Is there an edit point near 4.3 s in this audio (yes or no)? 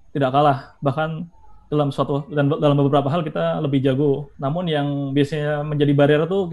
yes